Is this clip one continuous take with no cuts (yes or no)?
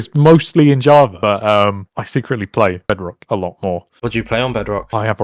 yes